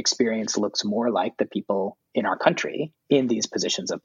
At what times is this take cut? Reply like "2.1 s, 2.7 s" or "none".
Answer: 2.0 s, 2.9 s